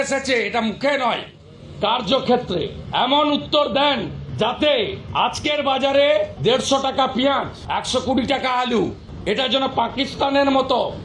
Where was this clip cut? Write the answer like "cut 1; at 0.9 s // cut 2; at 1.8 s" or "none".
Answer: cut 1; at 2.8 s // cut 2; at 4.2 s // cut 3; at 5.0 s // cut 4; at 6.3 s // cut 5; at 7.6 s // cut 6; at 9.1 s